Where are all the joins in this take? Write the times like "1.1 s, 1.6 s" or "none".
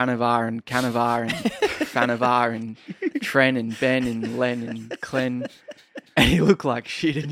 none